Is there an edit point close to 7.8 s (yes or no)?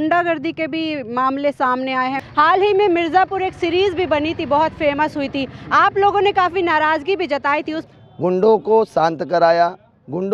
yes